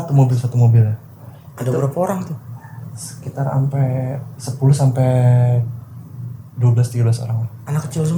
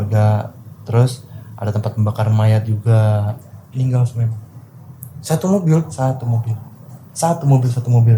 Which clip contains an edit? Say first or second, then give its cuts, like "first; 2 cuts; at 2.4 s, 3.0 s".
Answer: second; 1 cut; at 3.3 s